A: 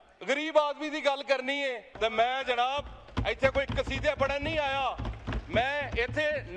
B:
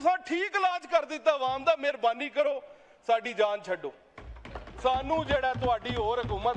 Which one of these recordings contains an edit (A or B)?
A